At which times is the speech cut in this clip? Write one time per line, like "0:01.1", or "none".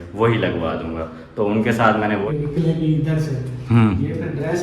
0:02.2